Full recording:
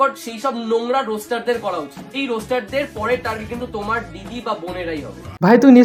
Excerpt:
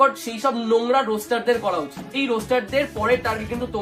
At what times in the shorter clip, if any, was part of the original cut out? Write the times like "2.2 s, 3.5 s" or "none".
none